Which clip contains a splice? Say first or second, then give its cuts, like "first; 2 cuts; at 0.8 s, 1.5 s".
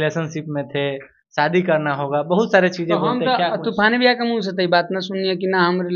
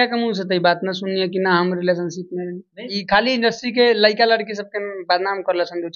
second; 1 cut; at 2.9 s